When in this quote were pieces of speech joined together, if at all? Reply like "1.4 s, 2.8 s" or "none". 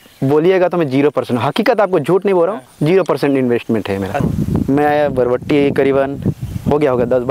4.2 s